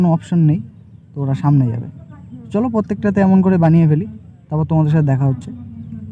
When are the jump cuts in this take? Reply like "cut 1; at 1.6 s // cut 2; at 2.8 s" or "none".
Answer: none